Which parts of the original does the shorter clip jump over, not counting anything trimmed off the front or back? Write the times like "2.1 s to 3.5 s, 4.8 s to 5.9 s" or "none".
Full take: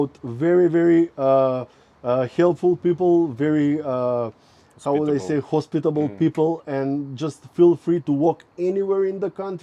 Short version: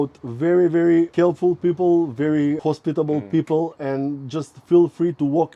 1.1 s to 2.3 s, 3.8 s to 5.5 s